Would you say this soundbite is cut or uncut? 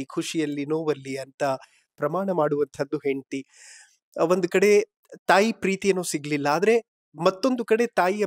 uncut